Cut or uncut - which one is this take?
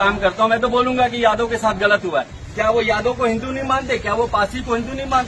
cut